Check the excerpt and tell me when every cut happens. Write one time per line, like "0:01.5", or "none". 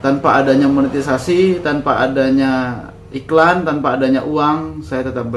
none